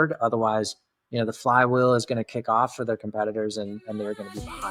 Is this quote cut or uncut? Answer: uncut